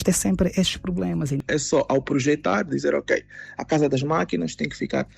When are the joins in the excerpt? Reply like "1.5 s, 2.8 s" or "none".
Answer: 1.4 s